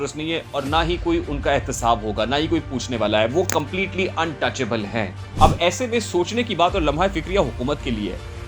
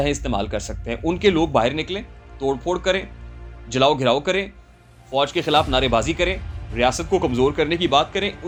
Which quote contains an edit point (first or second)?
first